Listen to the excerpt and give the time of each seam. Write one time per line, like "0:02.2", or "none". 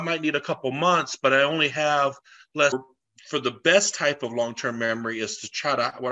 0:02.7